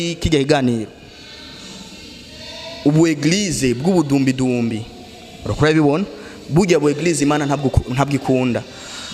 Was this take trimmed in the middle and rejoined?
no; 0 cuts

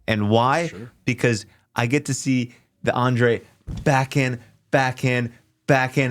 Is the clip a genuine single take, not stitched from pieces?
yes; 0 cuts

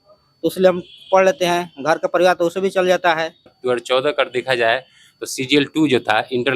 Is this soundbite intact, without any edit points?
no; 1 cut; at 3.5 s

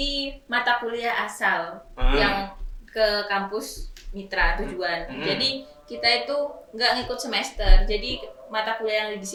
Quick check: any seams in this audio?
no; 0 cuts

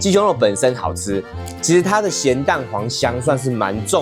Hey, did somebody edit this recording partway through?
yes; 1 cut; at 1.3 s

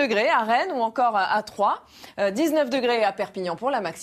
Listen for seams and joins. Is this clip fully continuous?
no; 1 cut; at 1.2 s

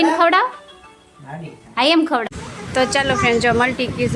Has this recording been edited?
yes; 1 cut; at 2.2 s

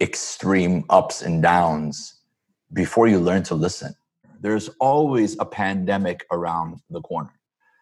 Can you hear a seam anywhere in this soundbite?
yes; 1 cut; at 4.3 s

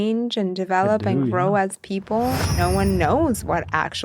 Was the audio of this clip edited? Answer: yes; 1 cut; at 2.5 s

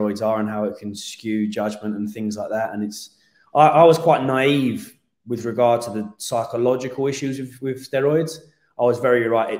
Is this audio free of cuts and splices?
yes; 0 cuts

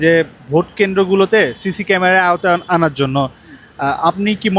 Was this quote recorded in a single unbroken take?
yes; 0 cuts

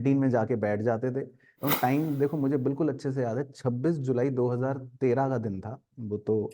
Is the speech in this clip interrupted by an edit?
yes; 1 cut; at 1.6 s

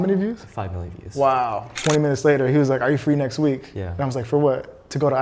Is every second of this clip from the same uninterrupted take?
no; 1 cut; at 1.8 s

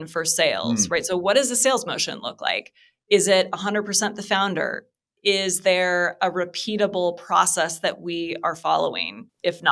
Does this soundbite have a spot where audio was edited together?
no; 0 cuts

